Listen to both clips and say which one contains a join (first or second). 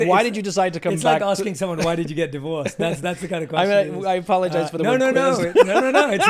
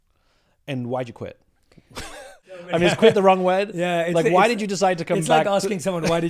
second